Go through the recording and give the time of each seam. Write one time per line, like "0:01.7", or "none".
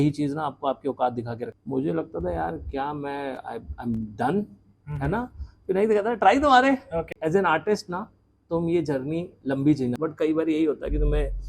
0:01.6
0:07.2
0:10.0